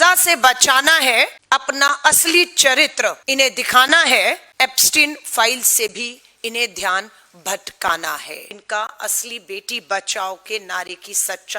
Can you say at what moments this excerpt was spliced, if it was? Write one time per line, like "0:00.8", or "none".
0:01.4
0:03.2
0:04.5
0:08.5